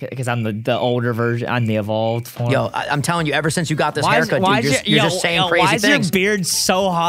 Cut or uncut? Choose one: uncut